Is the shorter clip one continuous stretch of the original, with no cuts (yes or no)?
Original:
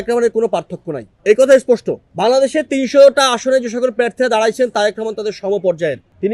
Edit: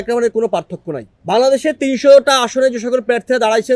no